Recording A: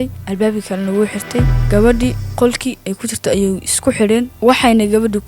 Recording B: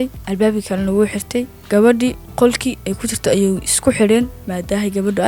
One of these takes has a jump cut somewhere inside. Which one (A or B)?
A